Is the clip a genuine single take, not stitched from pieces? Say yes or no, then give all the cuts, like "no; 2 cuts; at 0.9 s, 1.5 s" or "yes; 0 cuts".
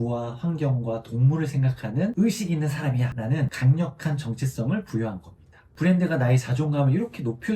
yes; 0 cuts